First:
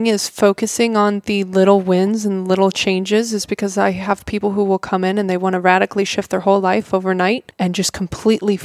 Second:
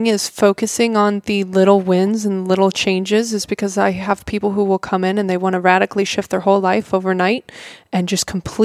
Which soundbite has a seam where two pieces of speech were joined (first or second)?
first